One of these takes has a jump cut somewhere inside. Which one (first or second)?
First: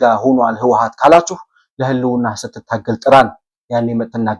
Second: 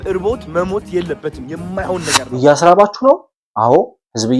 second